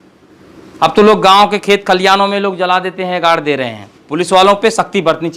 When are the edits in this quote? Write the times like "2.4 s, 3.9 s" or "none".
4.0 s